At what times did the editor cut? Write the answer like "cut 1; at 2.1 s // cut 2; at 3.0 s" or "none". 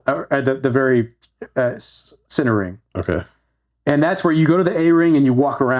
none